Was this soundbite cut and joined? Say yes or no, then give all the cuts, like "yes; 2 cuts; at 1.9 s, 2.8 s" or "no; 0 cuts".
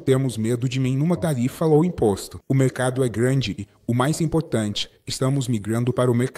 no; 0 cuts